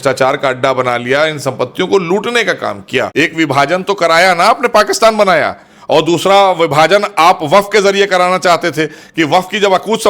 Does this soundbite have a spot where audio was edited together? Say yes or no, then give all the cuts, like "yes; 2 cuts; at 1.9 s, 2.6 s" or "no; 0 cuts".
yes; 1 cut; at 3.1 s